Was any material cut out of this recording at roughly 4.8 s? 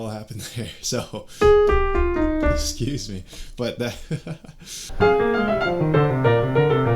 yes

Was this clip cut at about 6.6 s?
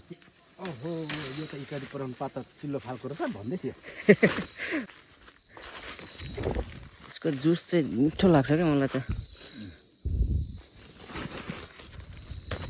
no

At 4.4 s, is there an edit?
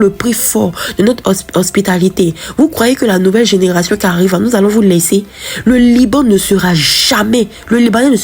no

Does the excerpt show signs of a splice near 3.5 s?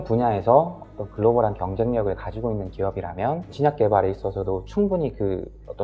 yes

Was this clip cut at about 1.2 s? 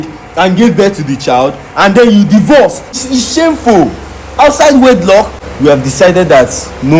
no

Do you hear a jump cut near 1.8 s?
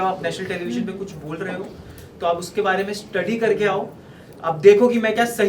no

